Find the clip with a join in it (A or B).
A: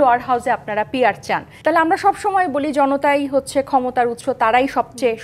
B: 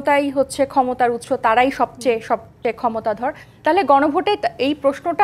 A